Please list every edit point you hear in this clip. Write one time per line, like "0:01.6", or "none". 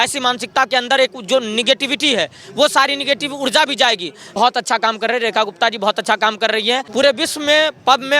0:04.2
0:06.9